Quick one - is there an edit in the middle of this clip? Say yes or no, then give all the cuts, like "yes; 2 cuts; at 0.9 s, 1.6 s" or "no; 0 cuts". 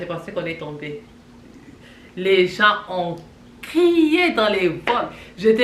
no; 0 cuts